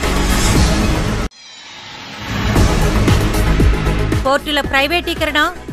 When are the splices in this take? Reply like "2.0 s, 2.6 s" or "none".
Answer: 4.0 s